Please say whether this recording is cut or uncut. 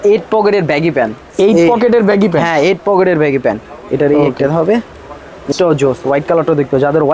cut